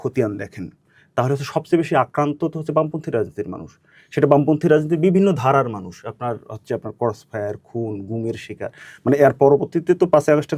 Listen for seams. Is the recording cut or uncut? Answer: uncut